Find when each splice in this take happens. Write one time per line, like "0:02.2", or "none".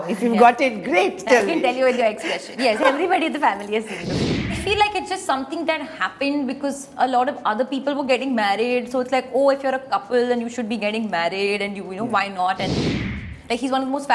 0:04.1
0:13.2